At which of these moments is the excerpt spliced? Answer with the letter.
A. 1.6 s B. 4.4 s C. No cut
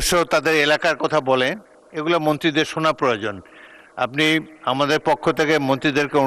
C